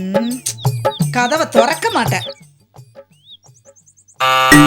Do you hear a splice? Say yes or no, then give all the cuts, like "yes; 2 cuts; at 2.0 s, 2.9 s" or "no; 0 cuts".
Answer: no; 0 cuts